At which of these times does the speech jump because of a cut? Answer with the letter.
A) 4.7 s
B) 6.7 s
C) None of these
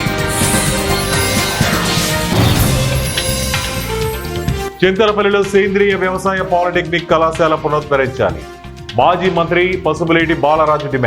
A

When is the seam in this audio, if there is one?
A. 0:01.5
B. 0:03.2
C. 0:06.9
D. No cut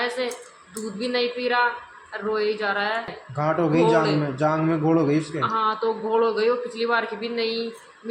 B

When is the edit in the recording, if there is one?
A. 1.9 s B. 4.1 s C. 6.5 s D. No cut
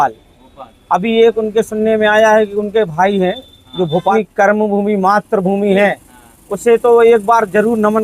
B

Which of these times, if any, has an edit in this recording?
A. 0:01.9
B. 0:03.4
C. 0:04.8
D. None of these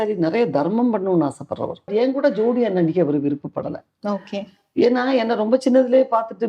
A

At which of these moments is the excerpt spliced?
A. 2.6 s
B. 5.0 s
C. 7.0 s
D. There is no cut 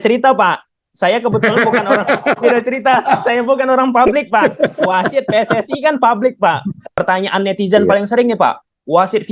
C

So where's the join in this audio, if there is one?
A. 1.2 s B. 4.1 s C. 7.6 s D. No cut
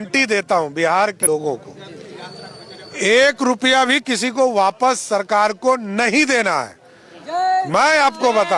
A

